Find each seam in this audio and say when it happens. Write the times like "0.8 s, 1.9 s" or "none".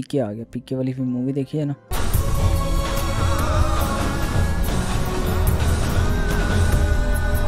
none